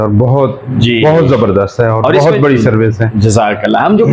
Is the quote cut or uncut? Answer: uncut